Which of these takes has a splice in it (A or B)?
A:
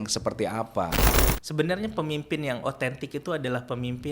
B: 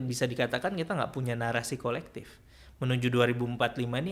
A